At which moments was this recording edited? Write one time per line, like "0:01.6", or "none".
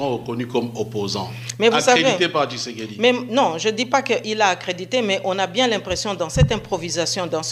none